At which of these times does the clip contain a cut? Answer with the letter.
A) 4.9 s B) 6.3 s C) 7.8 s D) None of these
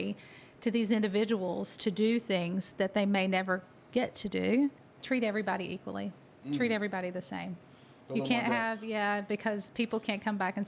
A